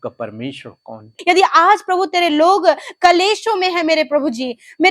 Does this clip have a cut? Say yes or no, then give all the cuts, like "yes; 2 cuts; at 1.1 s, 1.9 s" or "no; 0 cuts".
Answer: yes; 1 cut; at 1.1 s